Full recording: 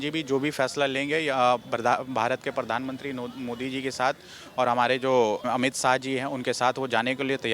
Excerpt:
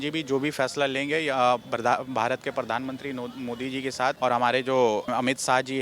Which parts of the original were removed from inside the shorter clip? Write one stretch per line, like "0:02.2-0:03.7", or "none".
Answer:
0:04.2-0:04.5